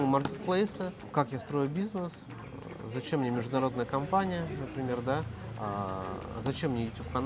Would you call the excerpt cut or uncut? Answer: uncut